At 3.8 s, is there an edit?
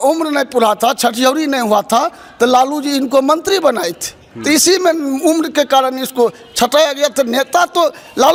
no; 0 cuts

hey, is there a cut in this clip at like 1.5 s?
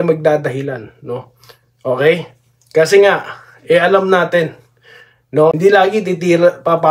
no; 1 cut; at 5.5 s

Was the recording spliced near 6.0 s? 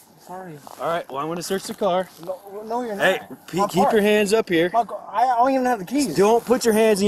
no; 0 cuts

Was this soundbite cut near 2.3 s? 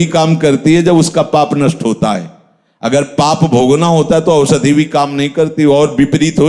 no; 0 cuts

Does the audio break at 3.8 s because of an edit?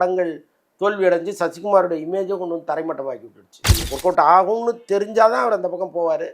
yes; 1 cut; at 3.8 s

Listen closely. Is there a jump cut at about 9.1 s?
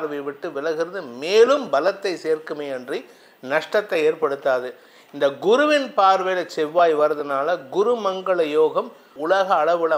yes; 1 cut; at 9.1 s

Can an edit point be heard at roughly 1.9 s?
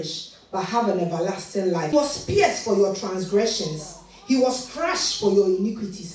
yes; 1 cut; at 1.9 s

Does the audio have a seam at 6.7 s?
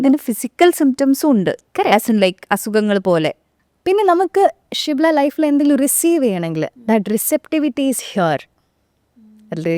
no; 1 cut; at 3.5 s

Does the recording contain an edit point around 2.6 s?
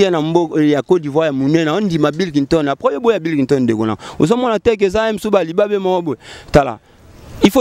no; 0 cuts

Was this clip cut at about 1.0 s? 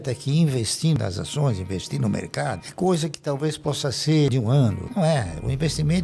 yes; 2 cuts; at 1.0 s, 4.6 s

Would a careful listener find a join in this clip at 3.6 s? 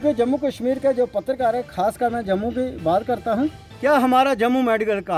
yes; 1 cut; at 3.6 s

